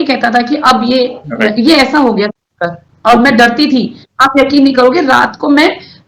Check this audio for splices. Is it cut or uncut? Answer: cut